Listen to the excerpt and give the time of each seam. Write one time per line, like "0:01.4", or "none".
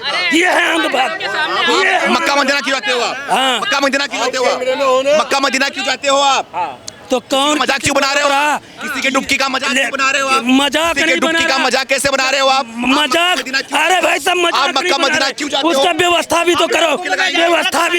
none